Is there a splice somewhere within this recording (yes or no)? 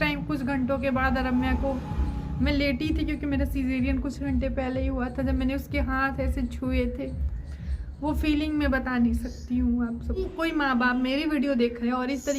yes